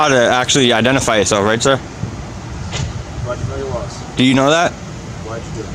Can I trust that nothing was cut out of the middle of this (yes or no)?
yes